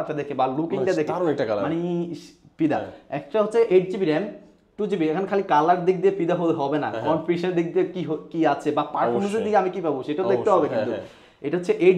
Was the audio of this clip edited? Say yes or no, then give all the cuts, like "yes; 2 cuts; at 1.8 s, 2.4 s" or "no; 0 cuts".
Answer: no; 0 cuts